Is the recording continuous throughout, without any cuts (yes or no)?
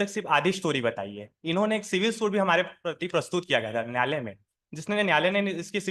yes